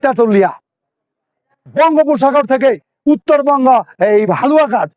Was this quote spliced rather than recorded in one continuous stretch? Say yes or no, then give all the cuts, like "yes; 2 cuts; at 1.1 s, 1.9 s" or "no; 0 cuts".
no; 0 cuts